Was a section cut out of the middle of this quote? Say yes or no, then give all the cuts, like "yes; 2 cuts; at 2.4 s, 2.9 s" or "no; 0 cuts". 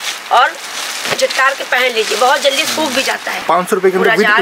yes; 1 cut; at 3.3 s